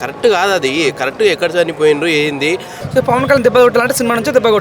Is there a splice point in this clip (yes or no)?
yes